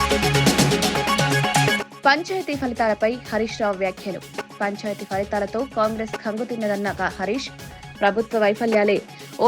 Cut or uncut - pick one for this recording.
cut